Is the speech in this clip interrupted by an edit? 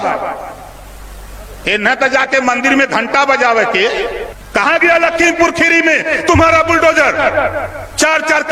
yes; 1 cut; at 4.3 s

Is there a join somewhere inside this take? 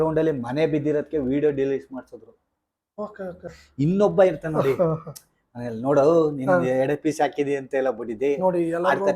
yes; 1 cut; at 3.6 s

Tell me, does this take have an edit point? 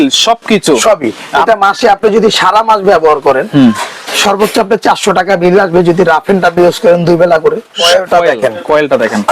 yes; 2 cuts; at 1.5 s, 7.8 s

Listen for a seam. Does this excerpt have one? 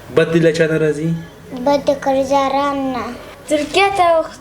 yes; 1 cut; at 3.3 s

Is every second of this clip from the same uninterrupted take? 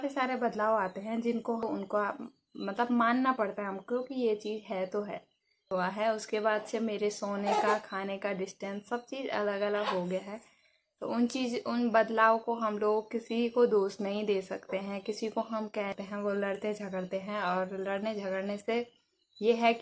no; 3 cuts; at 1.6 s, 5.7 s, 15.9 s

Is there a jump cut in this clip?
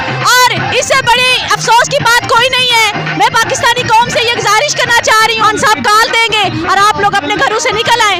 no; 0 cuts

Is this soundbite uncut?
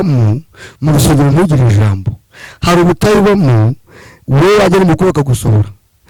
yes; 0 cuts

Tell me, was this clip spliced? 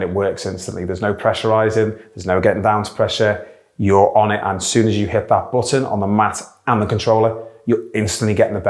no; 0 cuts

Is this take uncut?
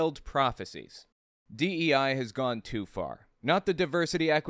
no; 1 cut; at 1.3 s

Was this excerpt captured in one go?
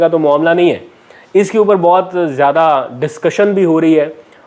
yes; 0 cuts

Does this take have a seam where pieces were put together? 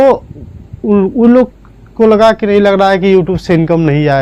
no; 0 cuts

